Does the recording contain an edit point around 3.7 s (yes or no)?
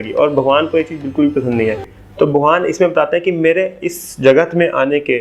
no